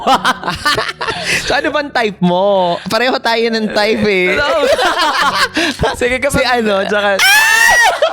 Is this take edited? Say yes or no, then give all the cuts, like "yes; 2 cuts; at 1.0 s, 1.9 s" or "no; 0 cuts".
yes; 2 cuts; at 0.7 s, 5.8 s